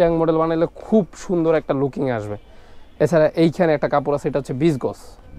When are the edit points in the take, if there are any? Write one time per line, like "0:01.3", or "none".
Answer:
none